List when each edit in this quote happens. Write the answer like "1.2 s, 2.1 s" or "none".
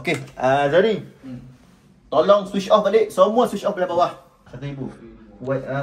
4.5 s